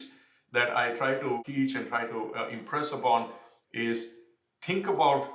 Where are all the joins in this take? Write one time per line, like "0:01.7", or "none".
0:01.4